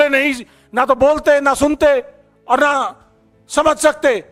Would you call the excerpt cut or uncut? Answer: uncut